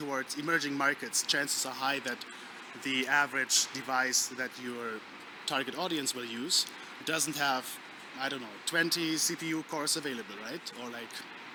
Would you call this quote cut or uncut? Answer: uncut